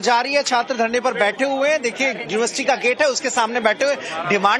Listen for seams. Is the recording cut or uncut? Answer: uncut